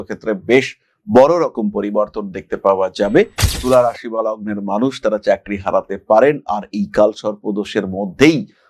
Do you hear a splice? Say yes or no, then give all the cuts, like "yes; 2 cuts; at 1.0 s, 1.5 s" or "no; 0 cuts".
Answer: yes; 1 cut; at 3.4 s